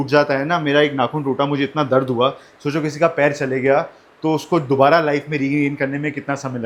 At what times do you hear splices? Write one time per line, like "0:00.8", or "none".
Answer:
none